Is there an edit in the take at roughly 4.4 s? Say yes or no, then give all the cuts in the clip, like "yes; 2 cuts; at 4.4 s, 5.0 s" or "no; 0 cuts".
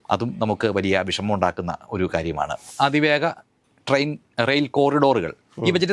no; 1 cut; at 2.7 s